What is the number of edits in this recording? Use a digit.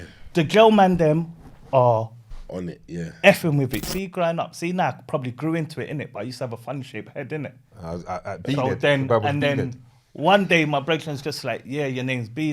1